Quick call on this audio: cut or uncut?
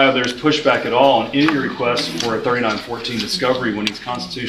uncut